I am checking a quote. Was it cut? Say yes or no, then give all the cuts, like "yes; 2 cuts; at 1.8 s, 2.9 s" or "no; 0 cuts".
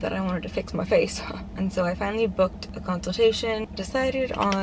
yes; 2 cuts; at 2.7 s, 3.7 s